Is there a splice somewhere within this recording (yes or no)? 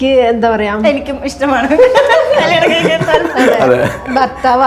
no